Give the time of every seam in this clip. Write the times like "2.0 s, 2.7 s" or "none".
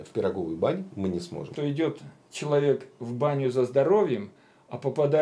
1.5 s